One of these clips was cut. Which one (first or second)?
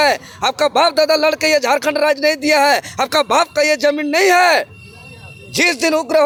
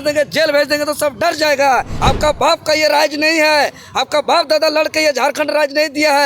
second